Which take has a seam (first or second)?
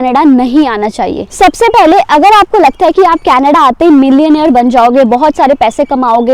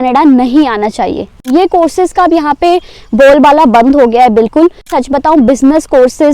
second